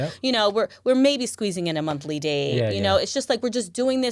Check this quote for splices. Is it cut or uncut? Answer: uncut